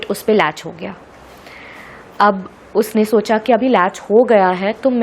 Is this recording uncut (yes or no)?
yes